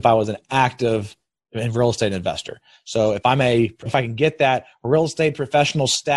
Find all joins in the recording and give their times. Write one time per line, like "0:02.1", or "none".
0:03.9